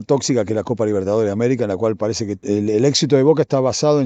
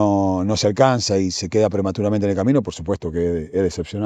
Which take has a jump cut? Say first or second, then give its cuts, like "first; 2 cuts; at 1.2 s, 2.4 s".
first; 1 cut; at 2.4 s